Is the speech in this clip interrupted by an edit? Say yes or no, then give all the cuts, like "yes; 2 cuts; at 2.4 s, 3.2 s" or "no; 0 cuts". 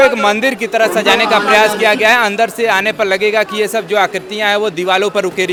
no; 0 cuts